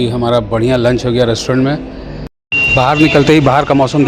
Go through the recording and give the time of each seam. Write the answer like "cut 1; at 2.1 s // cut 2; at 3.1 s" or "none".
cut 1; at 2.4 s